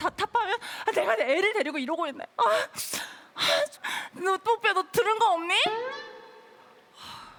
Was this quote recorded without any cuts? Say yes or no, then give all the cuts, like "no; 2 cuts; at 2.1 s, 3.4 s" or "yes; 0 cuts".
yes; 0 cuts